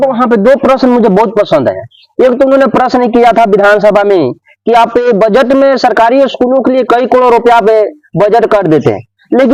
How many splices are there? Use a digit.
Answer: 0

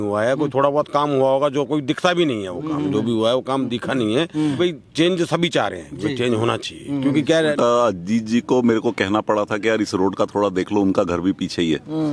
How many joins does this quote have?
2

